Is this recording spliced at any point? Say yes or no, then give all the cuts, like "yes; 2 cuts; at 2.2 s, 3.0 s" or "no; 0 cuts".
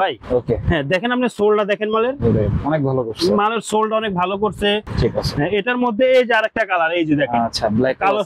yes; 1 cut; at 4.8 s